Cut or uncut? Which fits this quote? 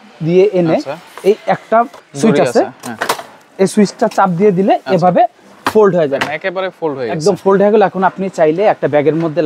cut